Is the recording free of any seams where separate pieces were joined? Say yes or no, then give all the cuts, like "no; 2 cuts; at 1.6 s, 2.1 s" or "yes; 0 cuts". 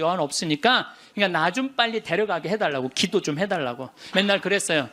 no; 2 cuts; at 1.0 s, 4.0 s